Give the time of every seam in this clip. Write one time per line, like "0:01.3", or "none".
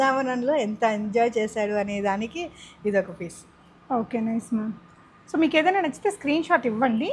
none